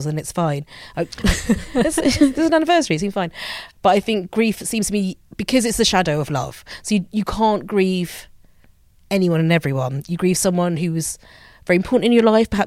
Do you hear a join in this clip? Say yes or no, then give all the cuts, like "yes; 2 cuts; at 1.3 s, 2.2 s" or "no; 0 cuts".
no; 0 cuts